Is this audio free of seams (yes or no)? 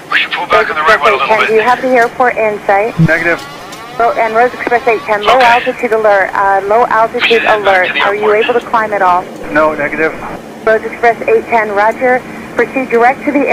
yes